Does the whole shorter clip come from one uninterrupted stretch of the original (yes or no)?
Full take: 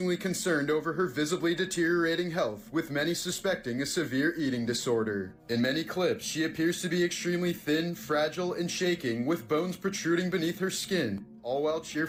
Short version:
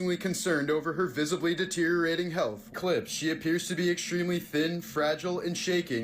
no